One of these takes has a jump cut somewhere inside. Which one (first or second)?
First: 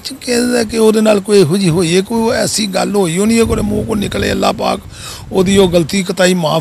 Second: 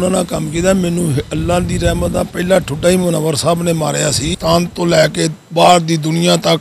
second